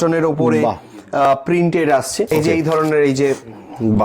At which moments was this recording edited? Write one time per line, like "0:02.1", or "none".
0:02.3